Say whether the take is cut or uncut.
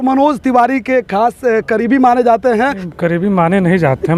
cut